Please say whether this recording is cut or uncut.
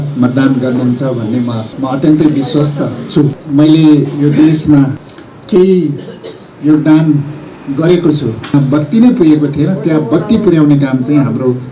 cut